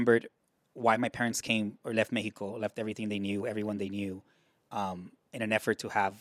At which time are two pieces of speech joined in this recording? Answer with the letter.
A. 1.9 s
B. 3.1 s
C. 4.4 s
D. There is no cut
D